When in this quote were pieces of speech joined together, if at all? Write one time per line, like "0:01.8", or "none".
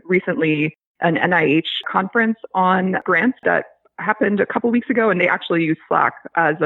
0:01.8
0:03.4